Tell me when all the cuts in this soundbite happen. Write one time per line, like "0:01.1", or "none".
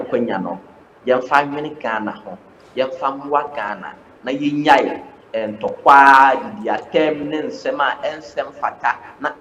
none